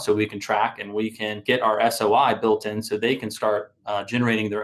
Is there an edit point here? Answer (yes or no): yes